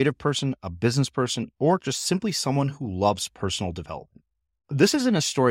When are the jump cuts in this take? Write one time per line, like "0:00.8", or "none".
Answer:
none